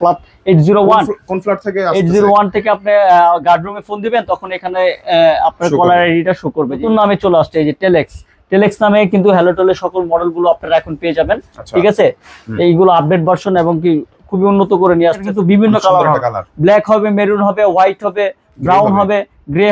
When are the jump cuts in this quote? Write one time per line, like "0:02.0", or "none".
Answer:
0:06.8
0:15.2